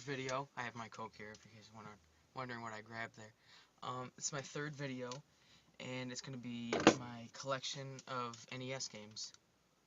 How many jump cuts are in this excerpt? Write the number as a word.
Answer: one